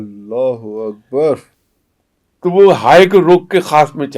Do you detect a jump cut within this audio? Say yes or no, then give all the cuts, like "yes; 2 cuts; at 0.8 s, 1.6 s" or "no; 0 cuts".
yes; 1 cut; at 1.6 s